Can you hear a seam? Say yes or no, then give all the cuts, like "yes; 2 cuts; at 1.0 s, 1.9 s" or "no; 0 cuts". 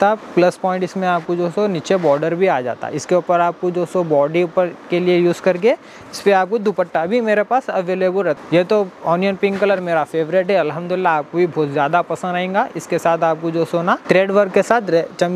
yes; 2 cuts; at 8.4 s, 14.0 s